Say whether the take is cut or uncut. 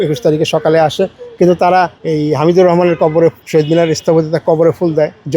cut